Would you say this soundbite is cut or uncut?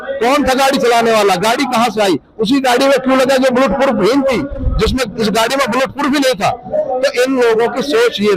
uncut